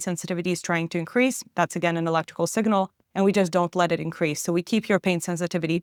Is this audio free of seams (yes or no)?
yes